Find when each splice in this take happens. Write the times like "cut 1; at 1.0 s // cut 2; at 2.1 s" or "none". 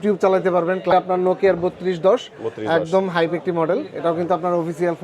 cut 1; at 0.9 s